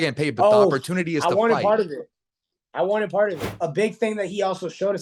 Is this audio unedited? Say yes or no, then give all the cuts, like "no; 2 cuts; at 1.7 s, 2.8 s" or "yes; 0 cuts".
no; 1 cut; at 3.5 s